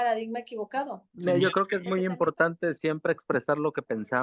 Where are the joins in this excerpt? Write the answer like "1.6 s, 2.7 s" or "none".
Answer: 1.0 s

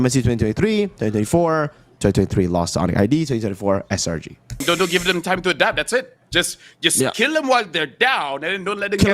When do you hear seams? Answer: 1.8 s, 4.6 s

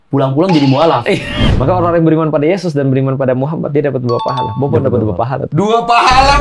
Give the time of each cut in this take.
1.3 s

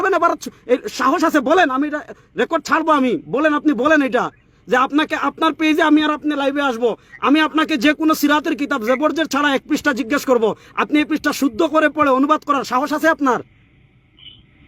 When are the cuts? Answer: none

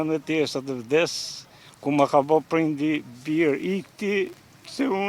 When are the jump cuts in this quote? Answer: none

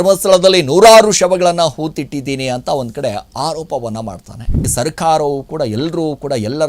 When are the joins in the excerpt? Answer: 4.7 s

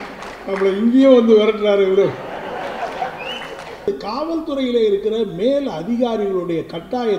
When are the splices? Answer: 3.9 s

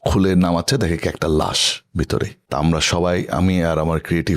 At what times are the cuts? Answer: 2.4 s

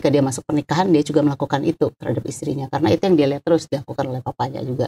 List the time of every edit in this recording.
none

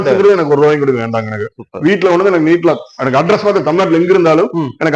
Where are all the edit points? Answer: none

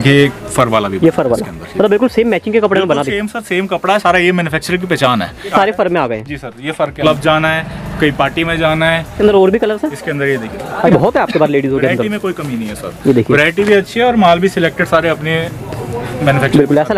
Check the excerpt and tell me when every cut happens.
5.5 s, 7.0 s, 9.2 s, 10.9 s

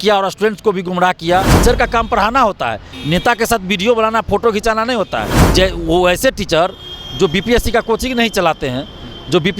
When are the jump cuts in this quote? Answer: 1.5 s, 5.4 s

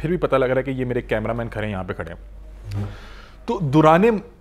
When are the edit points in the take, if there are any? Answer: none

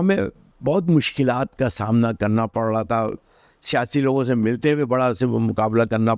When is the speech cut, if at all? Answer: none

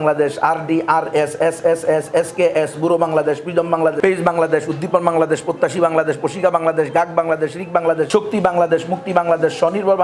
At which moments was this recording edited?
4.0 s, 8.1 s

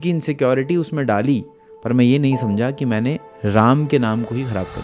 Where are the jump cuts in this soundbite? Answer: none

